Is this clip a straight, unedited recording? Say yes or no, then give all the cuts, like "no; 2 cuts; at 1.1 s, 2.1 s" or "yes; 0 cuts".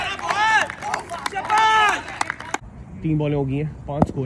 no; 1 cut; at 2.5 s